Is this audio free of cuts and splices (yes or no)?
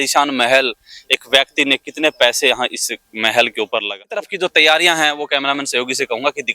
no